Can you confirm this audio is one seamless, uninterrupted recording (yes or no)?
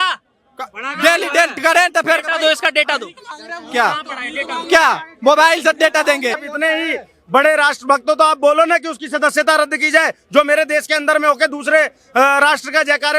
no